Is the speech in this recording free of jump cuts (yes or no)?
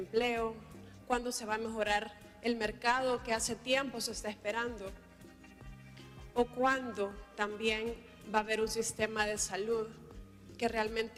yes